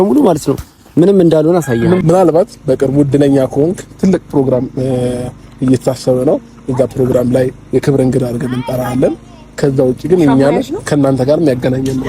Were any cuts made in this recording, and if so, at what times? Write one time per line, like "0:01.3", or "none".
0:02.0